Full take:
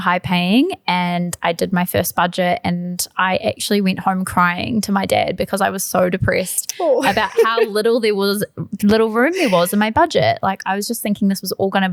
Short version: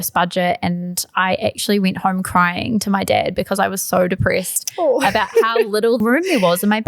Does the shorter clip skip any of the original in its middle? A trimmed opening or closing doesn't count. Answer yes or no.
yes